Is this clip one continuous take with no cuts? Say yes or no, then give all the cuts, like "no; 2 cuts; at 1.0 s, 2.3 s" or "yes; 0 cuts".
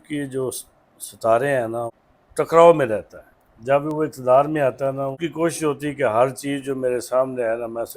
no; 2 cuts; at 2.0 s, 5.2 s